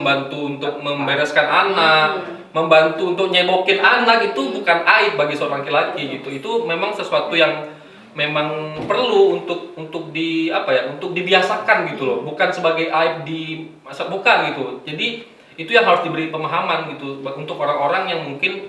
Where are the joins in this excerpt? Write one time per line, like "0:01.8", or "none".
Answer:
none